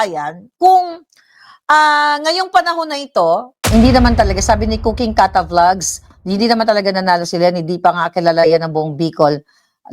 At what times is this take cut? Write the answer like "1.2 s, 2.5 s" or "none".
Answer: 3.5 s

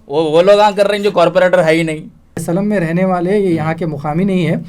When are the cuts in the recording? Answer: 2.4 s

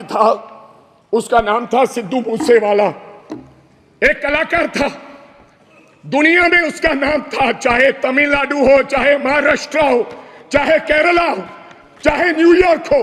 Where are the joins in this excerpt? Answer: none

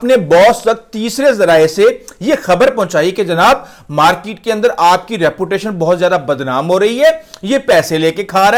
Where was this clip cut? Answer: none

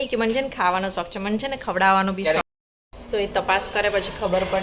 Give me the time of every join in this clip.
2.4 s

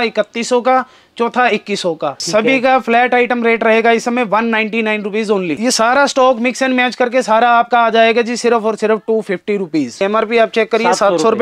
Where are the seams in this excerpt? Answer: 2.2 s, 5.5 s, 10.0 s

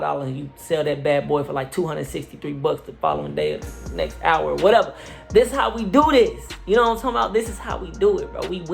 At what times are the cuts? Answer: none

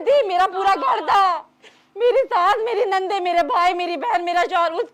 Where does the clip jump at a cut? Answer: none

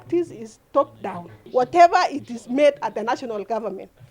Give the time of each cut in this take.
1.4 s

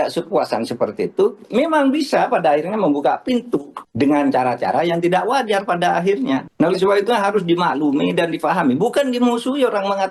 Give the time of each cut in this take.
none

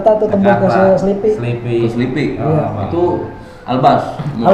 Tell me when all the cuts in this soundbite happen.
none

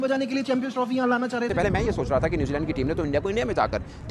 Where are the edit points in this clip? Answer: 1.5 s

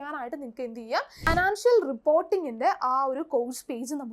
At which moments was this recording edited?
1.3 s

